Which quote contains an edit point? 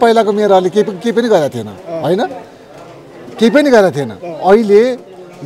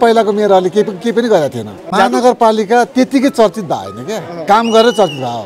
second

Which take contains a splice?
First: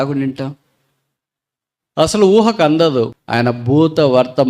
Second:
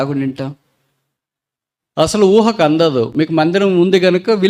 first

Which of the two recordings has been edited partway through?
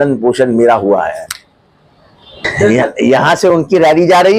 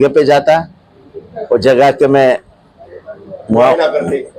first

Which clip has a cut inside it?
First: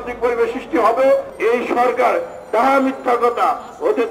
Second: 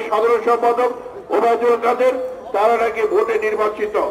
first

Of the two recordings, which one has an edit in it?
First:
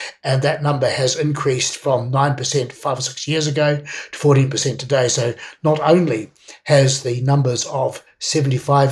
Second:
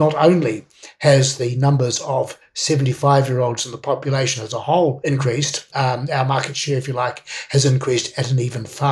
second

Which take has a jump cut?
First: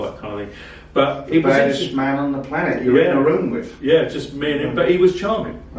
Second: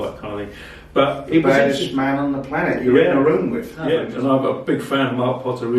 second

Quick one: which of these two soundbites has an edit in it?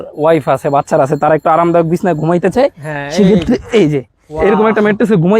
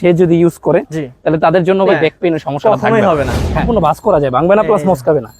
second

